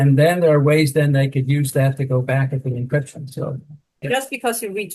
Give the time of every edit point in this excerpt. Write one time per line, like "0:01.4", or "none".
0:03.9